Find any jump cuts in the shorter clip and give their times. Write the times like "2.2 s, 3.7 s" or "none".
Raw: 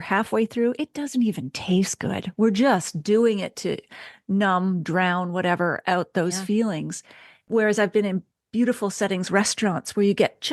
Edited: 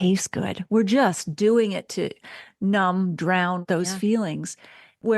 3.6 s